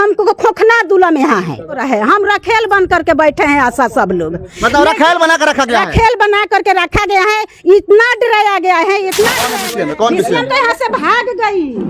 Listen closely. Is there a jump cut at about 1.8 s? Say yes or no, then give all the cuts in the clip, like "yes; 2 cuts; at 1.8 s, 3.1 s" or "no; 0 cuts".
yes; 2 cuts; at 1.8 s, 9.5 s